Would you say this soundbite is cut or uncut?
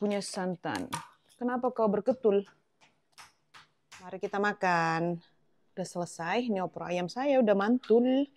cut